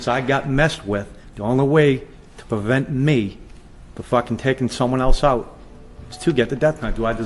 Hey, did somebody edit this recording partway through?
no; 0 cuts

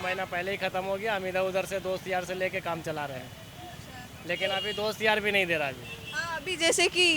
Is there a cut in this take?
no; 0 cuts

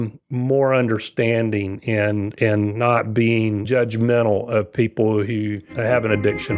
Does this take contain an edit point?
yes; 1 cut; at 5.7 s

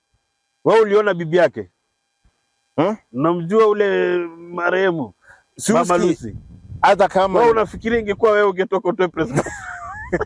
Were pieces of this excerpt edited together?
no; 0 cuts

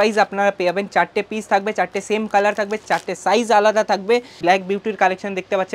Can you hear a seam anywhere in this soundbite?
yes; 1 cut; at 4.3 s

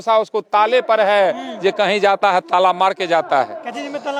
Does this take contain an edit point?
no; 0 cuts

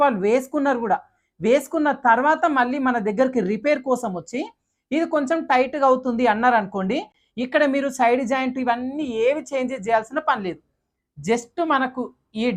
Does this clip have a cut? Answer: no; 0 cuts

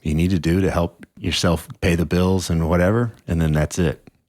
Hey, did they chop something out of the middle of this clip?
yes; 1 cut; at 1.1 s

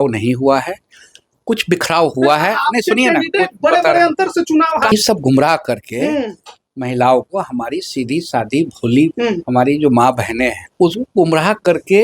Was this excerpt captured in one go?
no; 2 cuts; at 4.9 s, 10.6 s

